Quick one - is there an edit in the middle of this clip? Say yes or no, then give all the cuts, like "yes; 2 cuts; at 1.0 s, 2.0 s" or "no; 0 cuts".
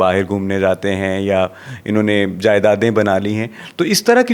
no; 0 cuts